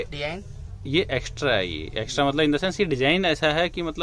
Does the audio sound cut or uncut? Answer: uncut